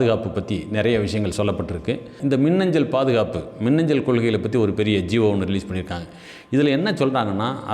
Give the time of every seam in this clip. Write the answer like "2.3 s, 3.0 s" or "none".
2.1 s